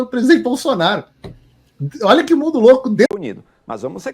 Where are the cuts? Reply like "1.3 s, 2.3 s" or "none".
3.1 s